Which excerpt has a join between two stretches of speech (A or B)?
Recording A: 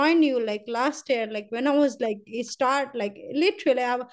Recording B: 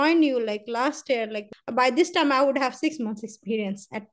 B